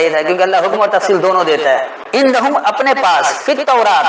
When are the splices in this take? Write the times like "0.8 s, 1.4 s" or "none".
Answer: 2.0 s